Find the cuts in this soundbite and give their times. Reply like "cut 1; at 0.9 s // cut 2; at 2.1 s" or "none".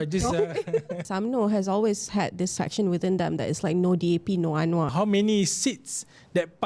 cut 1; at 1.1 s // cut 2; at 2.5 s // cut 3; at 4.9 s